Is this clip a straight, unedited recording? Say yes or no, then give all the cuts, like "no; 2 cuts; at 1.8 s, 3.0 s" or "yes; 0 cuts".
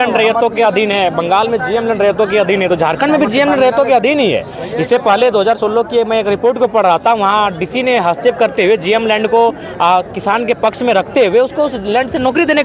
yes; 0 cuts